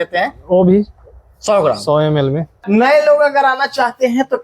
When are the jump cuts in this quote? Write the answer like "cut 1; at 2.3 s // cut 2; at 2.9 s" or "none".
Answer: cut 1; at 2.5 s